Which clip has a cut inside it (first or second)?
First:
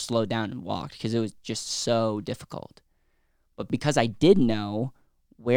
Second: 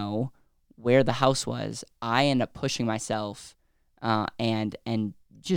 first